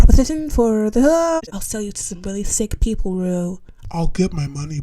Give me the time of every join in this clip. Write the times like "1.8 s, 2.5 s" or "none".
1.5 s